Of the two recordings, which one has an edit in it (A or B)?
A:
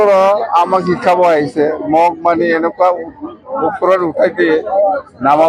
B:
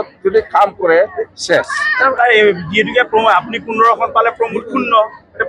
B